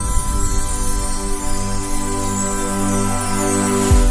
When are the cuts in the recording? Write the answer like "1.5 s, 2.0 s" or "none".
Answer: none